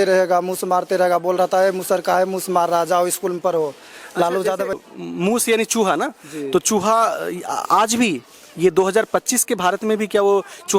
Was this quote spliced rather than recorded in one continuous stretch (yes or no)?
yes